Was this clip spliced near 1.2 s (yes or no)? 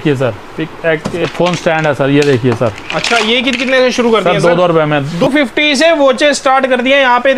yes